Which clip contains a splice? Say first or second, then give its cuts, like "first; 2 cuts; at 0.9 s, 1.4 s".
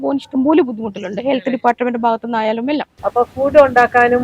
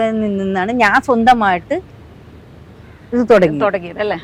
first; 1 cut; at 2.9 s